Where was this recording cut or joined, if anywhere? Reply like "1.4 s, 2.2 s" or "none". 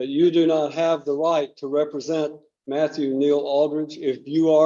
none